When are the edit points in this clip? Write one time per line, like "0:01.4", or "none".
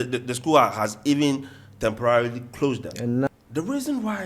0:03.3